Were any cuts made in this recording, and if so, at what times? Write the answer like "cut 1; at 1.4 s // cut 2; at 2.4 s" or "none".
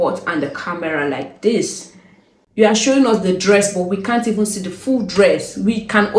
none